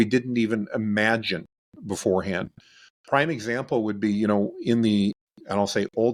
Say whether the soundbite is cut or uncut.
uncut